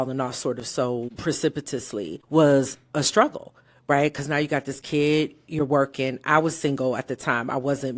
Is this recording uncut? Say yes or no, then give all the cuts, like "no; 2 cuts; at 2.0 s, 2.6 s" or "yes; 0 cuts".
no; 2 cuts; at 1.1 s, 2.2 s